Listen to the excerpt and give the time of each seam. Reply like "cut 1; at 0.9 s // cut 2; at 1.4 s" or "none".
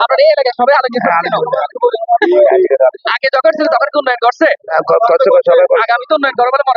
none